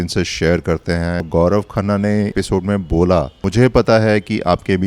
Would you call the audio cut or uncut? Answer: cut